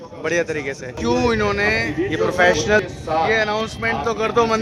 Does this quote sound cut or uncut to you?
cut